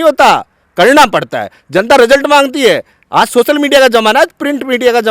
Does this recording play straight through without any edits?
yes; 0 cuts

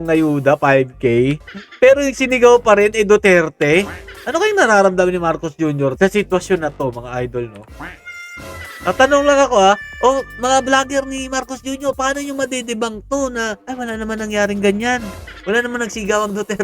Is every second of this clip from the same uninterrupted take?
yes; 0 cuts

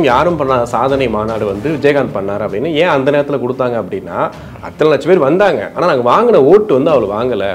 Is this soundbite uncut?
yes; 0 cuts

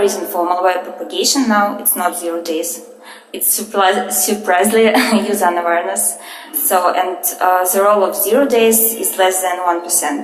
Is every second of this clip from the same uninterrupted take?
yes; 0 cuts

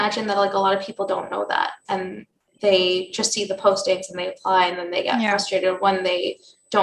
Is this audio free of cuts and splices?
yes; 0 cuts

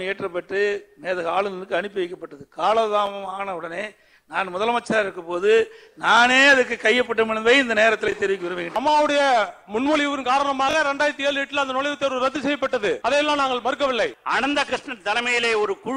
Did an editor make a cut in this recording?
yes; 3 cuts; at 8.7 s, 13.0 s, 14.2 s

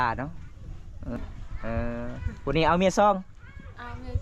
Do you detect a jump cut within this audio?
yes; 1 cut; at 1.2 s

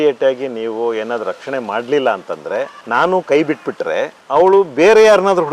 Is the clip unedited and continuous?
no; 1 cut; at 2.8 s

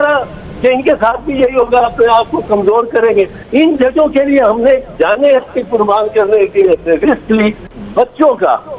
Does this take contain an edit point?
yes; 2 cuts; at 3.4 s, 7.7 s

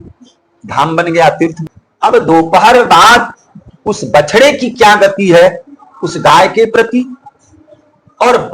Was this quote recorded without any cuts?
no; 1 cut; at 1.6 s

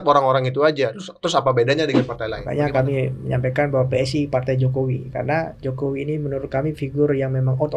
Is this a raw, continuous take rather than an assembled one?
no; 1 cut; at 2.4 s

